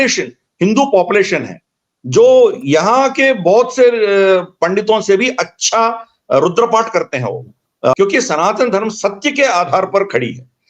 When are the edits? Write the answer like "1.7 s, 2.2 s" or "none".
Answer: 7.9 s